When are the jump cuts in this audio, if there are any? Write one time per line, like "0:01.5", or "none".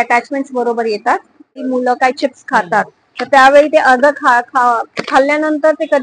0:01.7